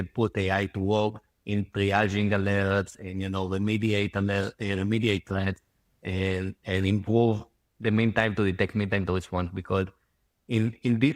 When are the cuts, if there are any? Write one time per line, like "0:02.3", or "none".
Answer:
none